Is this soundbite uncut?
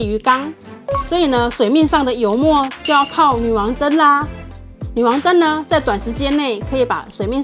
yes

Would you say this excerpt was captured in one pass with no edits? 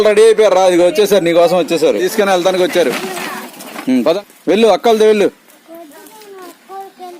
no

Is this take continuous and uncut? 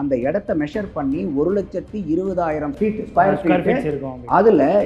no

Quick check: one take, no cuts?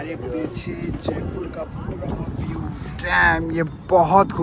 yes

